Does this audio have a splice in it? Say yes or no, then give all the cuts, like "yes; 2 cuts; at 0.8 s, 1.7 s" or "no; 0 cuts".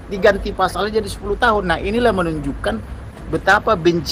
no; 0 cuts